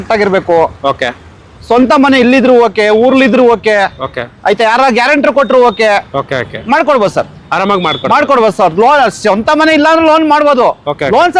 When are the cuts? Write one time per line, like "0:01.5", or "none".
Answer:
none